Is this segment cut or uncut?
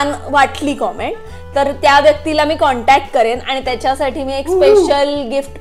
uncut